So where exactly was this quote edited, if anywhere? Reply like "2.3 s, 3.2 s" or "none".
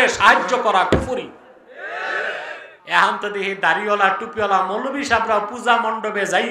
2.7 s